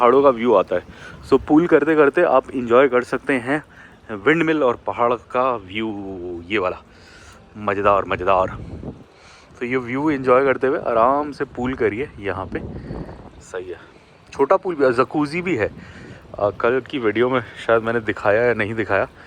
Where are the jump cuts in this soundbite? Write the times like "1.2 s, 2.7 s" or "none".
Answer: none